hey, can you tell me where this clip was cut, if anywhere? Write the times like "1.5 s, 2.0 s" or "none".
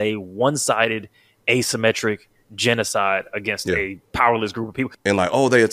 4.0 s, 4.9 s